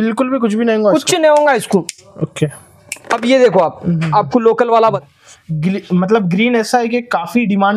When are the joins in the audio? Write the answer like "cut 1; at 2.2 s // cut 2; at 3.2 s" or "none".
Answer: cut 1; at 5.0 s